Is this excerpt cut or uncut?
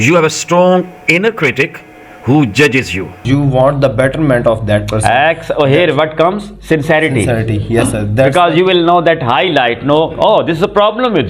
cut